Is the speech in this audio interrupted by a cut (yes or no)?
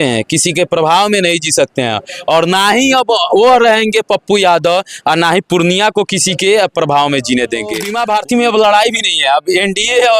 yes